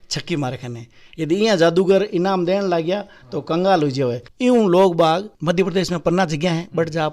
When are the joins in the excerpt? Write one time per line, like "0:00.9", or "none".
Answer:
0:04.3